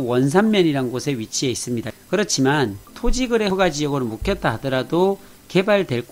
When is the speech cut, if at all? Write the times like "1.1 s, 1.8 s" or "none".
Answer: 1.9 s